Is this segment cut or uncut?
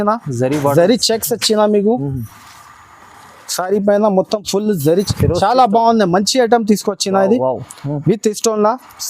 cut